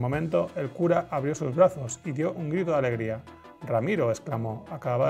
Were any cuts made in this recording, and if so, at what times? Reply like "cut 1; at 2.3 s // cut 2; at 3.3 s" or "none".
none

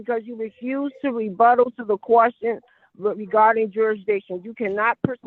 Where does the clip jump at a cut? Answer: none

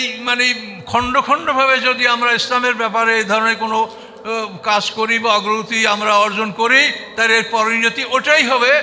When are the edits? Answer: none

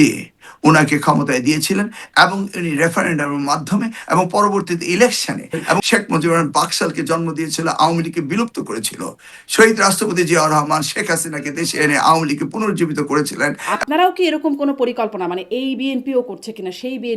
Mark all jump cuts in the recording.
cut 1; at 5.8 s // cut 2; at 13.6 s

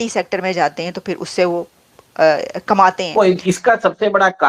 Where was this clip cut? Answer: cut 1; at 3.1 s

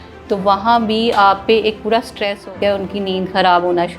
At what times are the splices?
cut 1; at 2.4 s

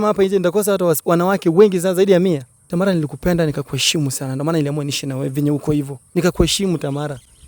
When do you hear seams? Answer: cut 1; at 2.5 s // cut 2; at 6.0 s

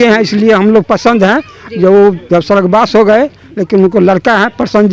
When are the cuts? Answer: none

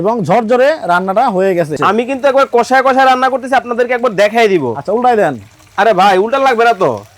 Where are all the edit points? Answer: cut 1; at 1.8 s

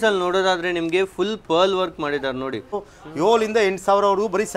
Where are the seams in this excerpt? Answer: cut 1; at 2.8 s

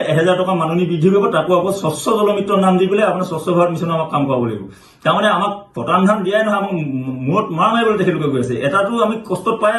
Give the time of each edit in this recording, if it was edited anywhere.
none

